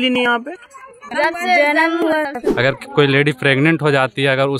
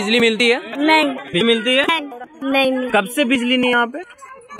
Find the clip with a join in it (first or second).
first